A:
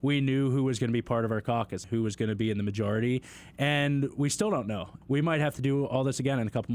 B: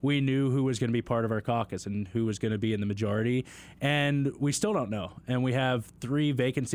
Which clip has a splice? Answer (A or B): A